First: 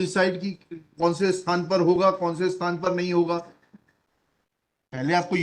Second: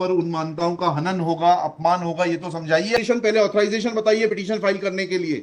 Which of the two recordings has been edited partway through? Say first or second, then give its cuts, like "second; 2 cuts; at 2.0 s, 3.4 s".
second; 1 cut; at 3.0 s